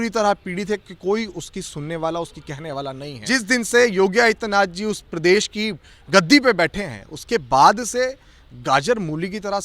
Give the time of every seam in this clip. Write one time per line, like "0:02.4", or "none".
0:03.1